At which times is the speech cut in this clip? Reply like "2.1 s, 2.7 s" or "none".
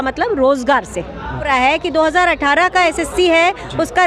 1.5 s